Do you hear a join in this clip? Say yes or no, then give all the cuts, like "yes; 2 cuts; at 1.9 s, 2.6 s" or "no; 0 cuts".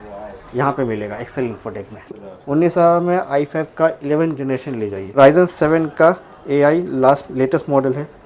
yes; 2 cuts; at 2.0 s, 5.1 s